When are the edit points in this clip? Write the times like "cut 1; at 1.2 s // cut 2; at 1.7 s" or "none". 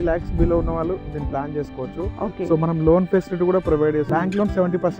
cut 1; at 4.1 s